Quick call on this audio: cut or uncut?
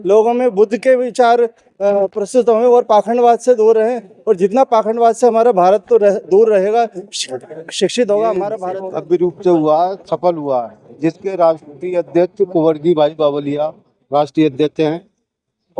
cut